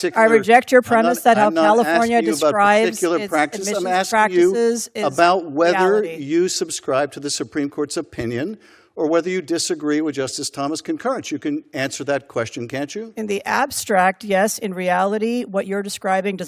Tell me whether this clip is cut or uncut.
uncut